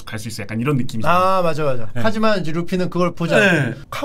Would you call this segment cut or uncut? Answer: uncut